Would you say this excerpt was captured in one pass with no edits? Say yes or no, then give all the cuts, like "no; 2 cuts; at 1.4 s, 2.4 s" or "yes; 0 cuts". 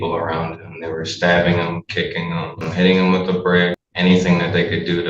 no; 2 cuts; at 2.7 s, 3.8 s